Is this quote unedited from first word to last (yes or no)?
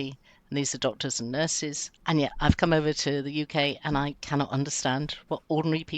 no